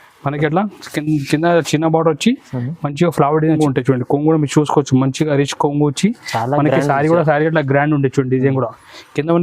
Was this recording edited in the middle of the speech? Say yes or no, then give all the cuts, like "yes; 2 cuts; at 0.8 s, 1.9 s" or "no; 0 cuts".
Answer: yes; 1 cut; at 3.6 s